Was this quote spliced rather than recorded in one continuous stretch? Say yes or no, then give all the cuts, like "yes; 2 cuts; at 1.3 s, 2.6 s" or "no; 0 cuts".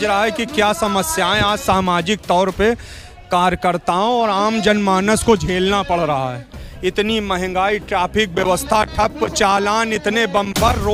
no; 0 cuts